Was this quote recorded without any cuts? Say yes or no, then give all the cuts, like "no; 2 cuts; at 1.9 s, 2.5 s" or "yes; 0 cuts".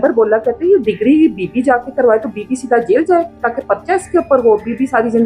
yes; 0 cuts